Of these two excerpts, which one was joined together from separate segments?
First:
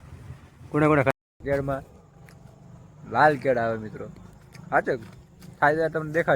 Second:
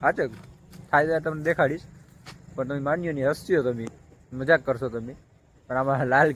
first; 1 cut; at 1.1 s

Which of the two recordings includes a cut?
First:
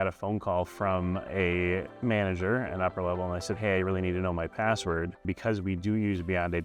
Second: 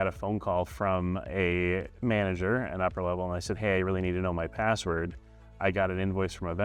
first; 1 cut; at 5.2 s

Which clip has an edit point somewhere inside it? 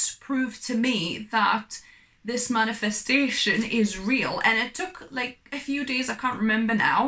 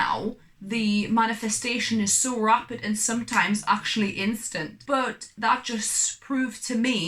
second; 1 cut; at 4.7 s

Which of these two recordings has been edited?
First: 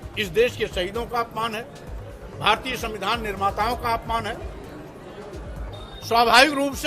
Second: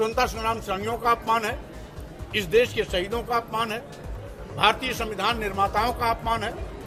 first; 1 cut; at 5.6 s

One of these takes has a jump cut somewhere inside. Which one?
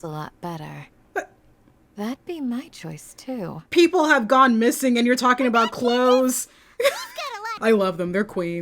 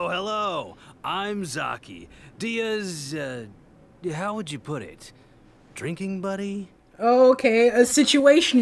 first; 1 cut; at 7.5 s

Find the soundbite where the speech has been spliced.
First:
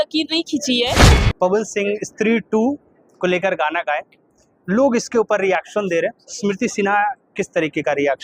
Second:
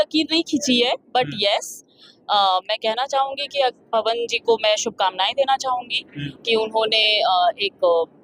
first; 1 cut; at 1.1 s

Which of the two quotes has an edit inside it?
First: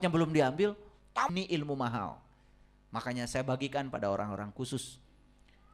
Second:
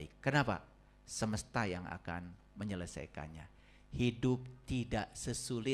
first; 1 cut; at 1.3 s

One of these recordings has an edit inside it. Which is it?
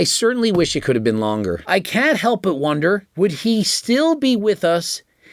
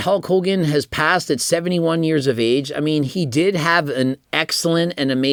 first; 2 cuts; at 1.6 s, 3.1 s

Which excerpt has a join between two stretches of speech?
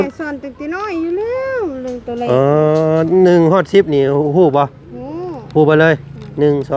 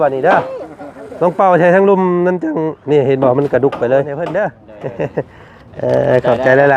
second; 1 cut; at 4.2 s

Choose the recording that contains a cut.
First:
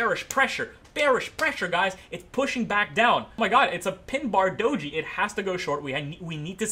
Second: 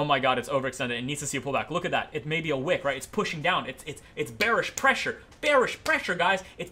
first; 1 cut; at 3.3 s

